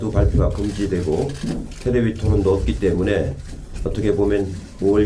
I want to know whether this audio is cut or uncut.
cut